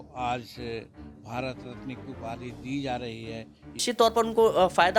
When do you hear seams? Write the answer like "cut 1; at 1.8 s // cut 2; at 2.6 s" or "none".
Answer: cut 1; at 3.9 s